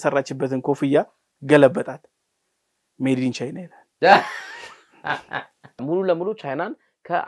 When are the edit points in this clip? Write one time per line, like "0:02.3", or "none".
0:05.8

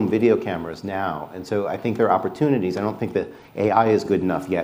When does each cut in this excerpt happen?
none

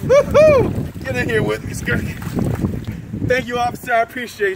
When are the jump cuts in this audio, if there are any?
0:03.0

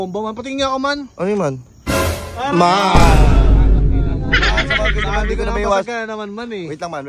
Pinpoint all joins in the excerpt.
none

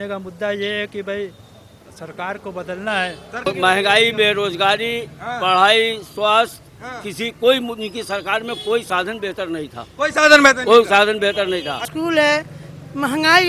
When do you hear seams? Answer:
0:03.4
0:11.9

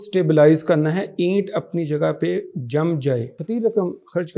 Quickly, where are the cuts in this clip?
0:03.4

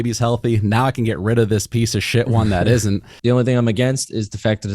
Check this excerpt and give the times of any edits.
0:03.1

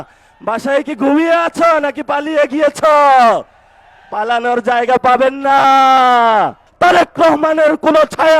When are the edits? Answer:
0:06.6

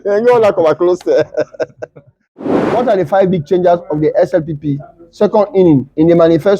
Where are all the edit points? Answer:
0:02.3

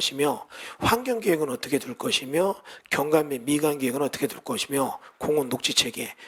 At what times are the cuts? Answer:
none

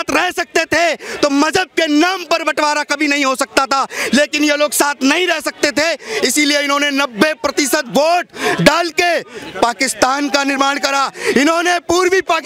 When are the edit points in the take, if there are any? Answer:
none

